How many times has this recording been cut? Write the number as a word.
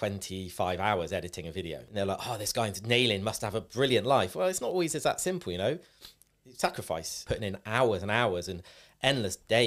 two